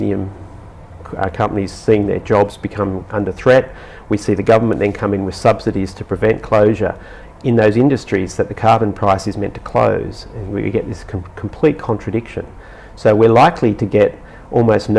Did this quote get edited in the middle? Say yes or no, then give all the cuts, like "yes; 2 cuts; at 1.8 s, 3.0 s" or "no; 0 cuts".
yes; 1 cut; at 3.1 s